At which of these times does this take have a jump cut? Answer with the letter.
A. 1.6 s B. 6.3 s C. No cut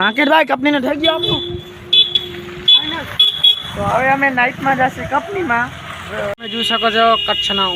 B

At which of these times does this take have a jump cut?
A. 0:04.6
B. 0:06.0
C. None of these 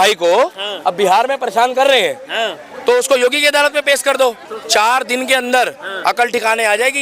A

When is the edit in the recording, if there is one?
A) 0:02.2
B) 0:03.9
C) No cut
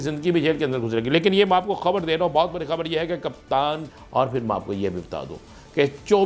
B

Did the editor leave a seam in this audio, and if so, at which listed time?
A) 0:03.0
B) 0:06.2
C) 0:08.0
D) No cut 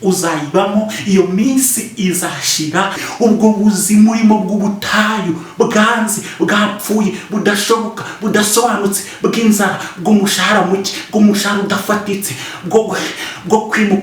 A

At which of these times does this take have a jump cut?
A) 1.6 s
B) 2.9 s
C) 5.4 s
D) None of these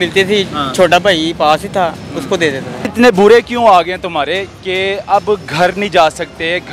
B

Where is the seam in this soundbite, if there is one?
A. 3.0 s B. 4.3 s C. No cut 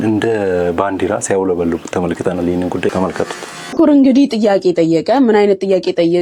C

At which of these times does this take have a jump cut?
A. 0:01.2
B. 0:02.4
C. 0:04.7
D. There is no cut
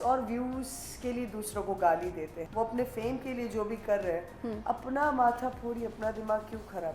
B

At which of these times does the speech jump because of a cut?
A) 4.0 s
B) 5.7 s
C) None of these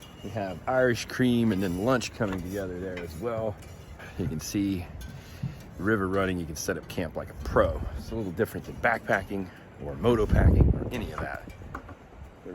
A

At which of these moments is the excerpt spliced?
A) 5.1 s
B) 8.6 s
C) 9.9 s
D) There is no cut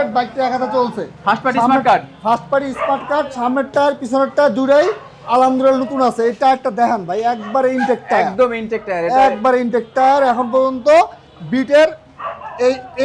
D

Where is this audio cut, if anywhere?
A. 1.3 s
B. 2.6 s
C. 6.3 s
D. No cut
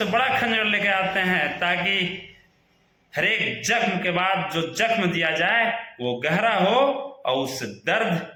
D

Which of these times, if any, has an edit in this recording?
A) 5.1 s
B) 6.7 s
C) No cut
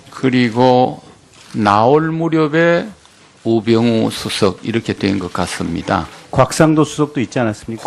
B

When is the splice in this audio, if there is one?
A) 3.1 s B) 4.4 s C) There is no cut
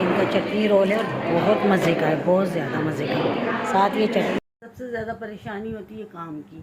B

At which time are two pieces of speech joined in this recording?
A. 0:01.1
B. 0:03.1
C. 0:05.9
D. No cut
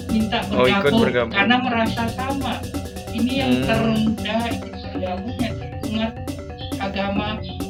D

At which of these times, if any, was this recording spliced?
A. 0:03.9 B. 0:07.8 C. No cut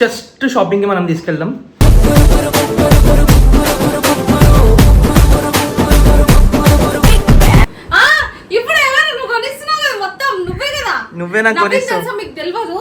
B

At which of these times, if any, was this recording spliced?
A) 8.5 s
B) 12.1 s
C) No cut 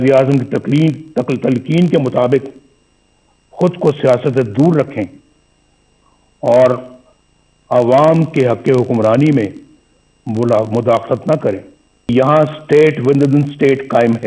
B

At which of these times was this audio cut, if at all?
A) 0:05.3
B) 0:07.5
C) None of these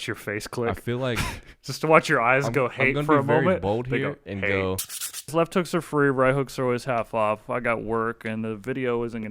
A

